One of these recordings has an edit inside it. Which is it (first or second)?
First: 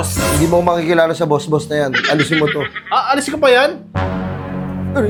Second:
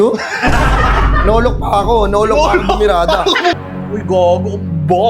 second